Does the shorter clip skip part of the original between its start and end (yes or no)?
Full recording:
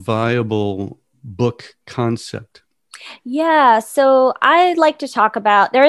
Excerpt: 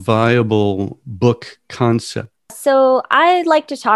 yes